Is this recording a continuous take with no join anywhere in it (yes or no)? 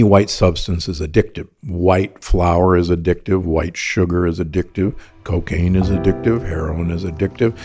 no